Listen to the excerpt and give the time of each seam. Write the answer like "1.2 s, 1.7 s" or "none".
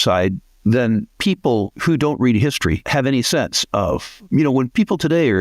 1.7 s, 2.9 s, 4.5 s